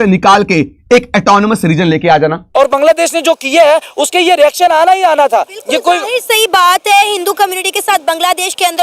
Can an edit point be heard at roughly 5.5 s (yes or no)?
no